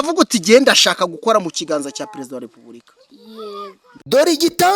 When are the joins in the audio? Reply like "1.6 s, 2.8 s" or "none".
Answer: 3.9 s